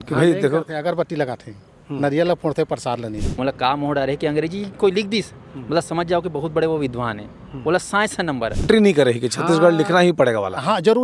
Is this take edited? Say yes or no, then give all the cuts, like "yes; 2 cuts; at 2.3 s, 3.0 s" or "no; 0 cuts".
yes; 2 cuts; at 3.3 s, 8.7 s